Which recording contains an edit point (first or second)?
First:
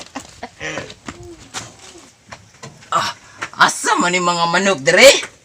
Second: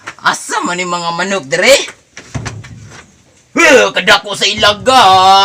first